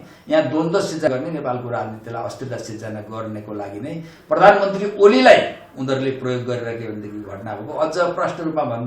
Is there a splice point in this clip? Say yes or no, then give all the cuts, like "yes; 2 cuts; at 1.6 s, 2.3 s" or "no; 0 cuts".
yes; 1 cut; at 1.1 s